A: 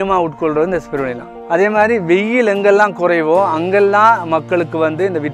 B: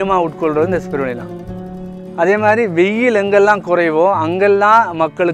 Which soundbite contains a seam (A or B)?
A